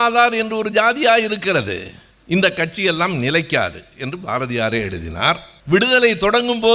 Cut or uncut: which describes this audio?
cut